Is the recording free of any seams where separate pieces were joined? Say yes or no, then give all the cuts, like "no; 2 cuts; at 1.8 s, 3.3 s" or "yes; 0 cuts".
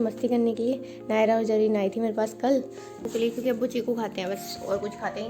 no; 1 cut; at 3.0 s